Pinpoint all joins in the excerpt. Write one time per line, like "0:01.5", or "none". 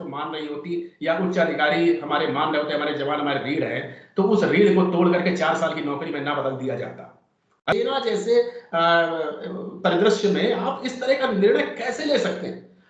0:07.7